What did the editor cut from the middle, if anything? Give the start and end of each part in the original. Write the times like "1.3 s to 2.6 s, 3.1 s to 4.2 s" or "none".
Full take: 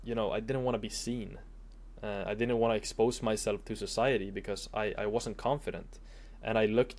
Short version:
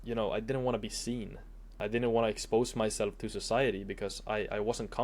1.8 s to 2.2 s